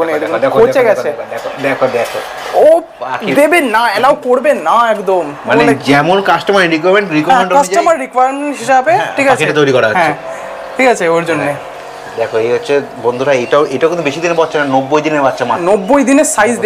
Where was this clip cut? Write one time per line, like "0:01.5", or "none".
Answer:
none